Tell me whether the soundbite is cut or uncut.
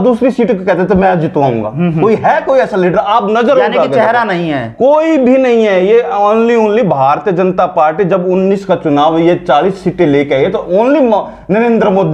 uncut